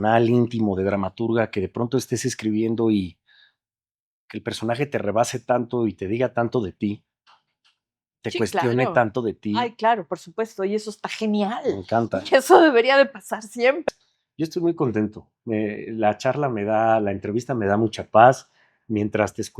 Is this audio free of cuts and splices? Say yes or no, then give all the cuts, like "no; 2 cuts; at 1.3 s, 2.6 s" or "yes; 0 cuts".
no; 1 cut; at 13.8 s